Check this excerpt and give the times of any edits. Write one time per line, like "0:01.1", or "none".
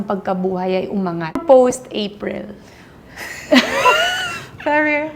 0:01.3